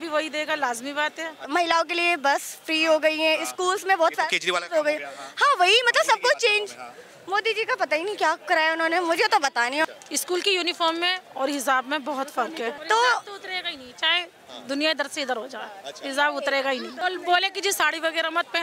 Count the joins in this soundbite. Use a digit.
4